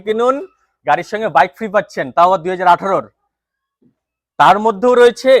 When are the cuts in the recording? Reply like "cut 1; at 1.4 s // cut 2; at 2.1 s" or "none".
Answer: none